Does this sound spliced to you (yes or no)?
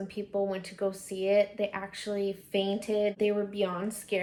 no